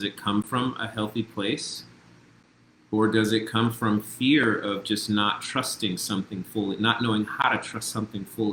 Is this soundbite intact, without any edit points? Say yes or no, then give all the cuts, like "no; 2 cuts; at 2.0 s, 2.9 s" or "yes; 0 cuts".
yes; 0 cuts